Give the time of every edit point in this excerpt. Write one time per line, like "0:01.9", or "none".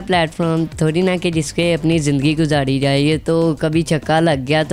none